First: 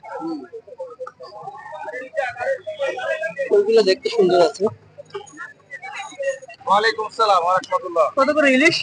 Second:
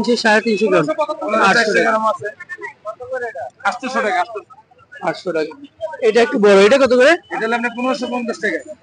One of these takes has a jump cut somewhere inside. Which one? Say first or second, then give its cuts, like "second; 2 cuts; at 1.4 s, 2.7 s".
first; 1 cut; at 6.5 s